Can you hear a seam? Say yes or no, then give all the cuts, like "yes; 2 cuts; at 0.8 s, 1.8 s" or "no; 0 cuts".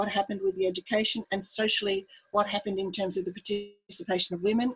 no; 0 cuts